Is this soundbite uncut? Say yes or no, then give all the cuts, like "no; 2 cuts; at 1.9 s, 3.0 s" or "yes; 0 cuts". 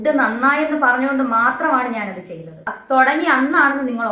no; 1 cut; at 2.7 s